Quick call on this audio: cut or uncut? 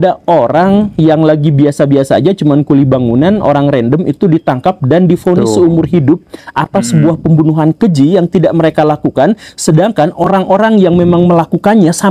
uncut